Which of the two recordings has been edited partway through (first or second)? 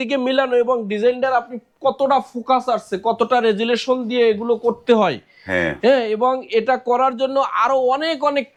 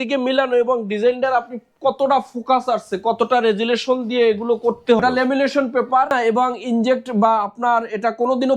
second